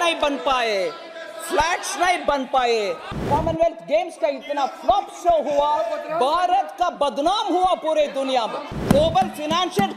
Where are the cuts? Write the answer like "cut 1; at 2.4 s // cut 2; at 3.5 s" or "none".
cut 1; at 3.2 s // cut 2; at 8.8 s